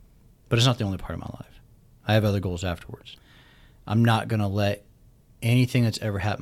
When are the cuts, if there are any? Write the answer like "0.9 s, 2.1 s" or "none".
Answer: 3.1 s